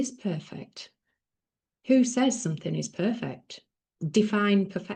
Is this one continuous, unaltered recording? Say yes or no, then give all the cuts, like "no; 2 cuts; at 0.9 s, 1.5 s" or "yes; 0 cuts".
yes; 0 cuts